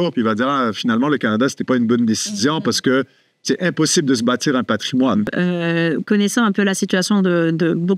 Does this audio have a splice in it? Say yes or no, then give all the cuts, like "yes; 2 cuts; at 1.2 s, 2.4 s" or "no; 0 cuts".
yes; 1 cut; at 5.3 s